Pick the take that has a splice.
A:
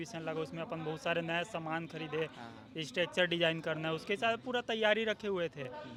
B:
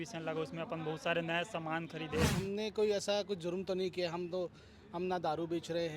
B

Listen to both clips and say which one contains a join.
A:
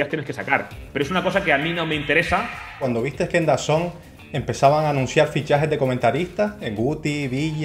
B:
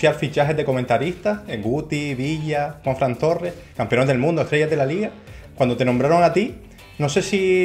A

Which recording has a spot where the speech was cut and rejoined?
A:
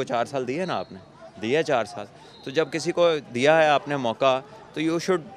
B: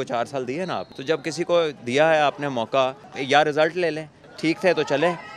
B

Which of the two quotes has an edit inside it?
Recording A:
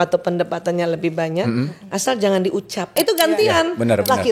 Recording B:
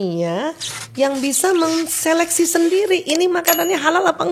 A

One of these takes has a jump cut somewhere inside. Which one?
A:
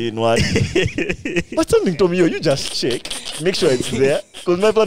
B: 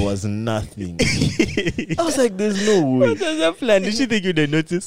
B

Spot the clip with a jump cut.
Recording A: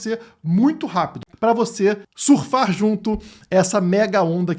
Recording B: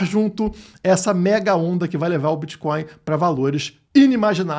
A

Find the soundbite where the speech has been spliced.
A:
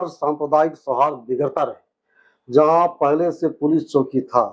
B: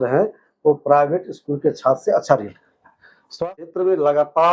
B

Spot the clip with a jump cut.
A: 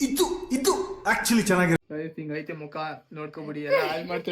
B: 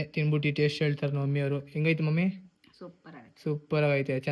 A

